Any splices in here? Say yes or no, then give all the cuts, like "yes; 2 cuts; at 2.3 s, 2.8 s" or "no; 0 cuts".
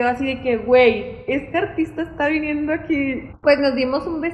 yes; 1 cut; at 3.3 s